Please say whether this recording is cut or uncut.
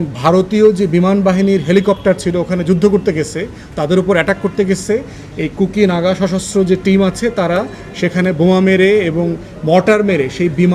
uncut